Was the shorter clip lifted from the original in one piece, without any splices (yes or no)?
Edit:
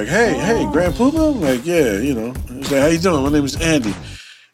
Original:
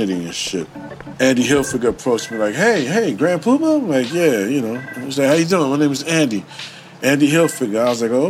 yes